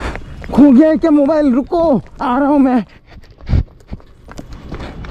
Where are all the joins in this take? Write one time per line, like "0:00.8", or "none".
none